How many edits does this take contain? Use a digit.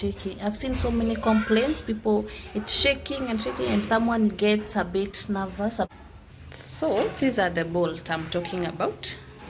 1